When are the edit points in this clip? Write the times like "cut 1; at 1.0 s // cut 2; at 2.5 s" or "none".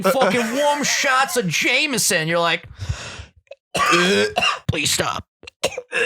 cut 1; at 4.6 s